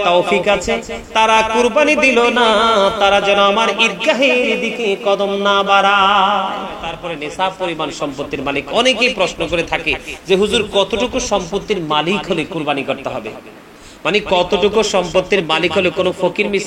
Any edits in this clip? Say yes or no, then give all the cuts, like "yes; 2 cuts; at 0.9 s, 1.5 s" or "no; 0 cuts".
yes; 1 cut; at 6.9 s